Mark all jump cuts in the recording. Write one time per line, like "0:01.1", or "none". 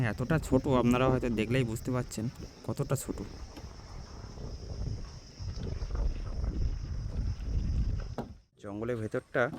0:08.4